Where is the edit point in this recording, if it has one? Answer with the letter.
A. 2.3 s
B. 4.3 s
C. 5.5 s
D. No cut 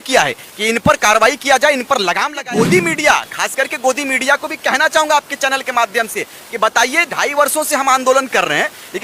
A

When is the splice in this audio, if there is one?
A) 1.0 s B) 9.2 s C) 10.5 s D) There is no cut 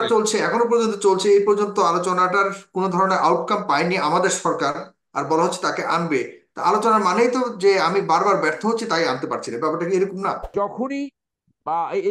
C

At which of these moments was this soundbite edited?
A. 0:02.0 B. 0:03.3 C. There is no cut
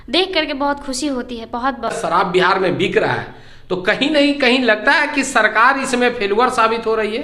A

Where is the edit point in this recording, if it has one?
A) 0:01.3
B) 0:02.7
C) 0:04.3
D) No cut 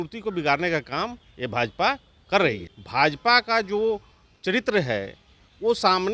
B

